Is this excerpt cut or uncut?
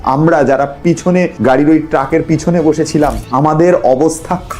cut